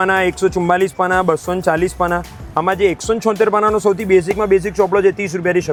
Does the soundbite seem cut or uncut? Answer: uncut